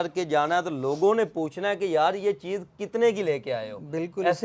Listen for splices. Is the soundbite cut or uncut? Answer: uncut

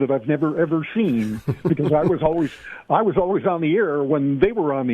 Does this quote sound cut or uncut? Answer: uncut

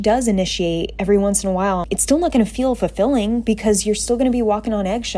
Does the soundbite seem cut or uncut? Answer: cut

